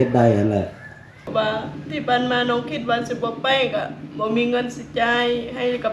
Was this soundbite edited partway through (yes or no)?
yes